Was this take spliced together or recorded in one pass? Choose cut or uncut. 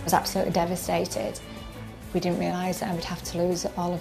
cut